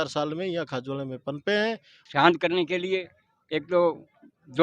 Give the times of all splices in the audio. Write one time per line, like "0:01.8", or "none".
0:01.9